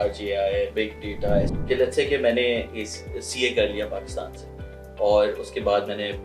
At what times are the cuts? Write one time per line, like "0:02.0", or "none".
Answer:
0:01.5